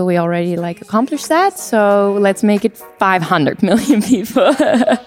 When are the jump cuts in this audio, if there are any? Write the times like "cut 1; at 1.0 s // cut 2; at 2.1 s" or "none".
none

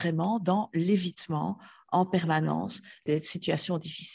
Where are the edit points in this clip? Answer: cut 1; at 3.0 s

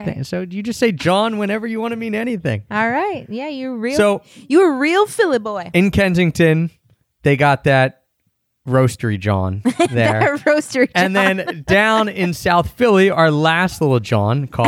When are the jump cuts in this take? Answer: cut 1; at 13.8 s

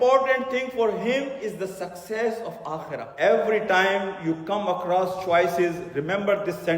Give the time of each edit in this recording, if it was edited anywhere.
cut 1; at 3.1 s

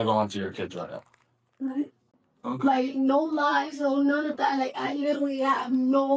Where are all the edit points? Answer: cut 1; at 2.0 s

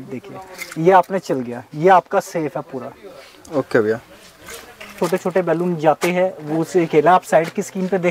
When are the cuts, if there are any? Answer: cut 1; at 4.8 s

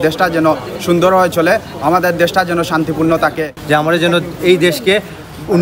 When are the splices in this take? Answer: cut 1; at 3.5 s

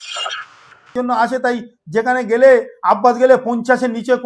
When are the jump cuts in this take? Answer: cut 1; at 0.9 s

